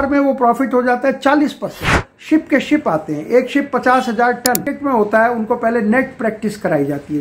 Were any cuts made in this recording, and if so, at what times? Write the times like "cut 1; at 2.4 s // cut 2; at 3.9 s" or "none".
cut 1; at 2.1 s // cut 2; at 4.7 s